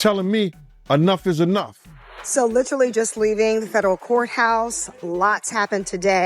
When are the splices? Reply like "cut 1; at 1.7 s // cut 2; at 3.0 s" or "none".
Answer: cut 1; at 2.2 s